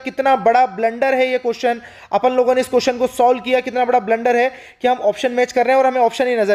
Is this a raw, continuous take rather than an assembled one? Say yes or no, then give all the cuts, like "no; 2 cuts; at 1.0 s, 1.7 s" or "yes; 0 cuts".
yes; 0 cuts